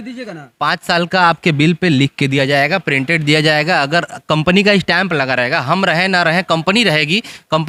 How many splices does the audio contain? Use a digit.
0